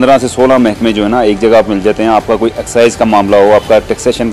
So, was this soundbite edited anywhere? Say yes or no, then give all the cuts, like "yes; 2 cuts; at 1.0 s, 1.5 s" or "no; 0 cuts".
no; 0 cuts